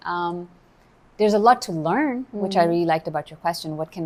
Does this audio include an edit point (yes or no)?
no